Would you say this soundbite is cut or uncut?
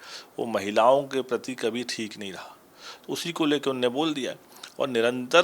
uncut